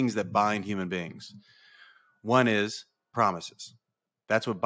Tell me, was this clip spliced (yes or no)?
no